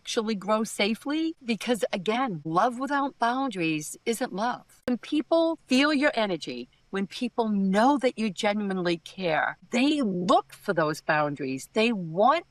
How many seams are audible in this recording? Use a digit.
1